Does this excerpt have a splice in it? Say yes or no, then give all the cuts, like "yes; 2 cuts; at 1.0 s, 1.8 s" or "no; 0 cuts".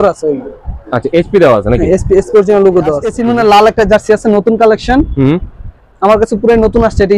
yes; 1 cut; at 3.1 s